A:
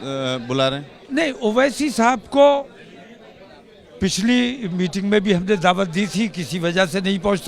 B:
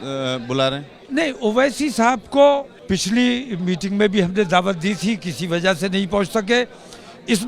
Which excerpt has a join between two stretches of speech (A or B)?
B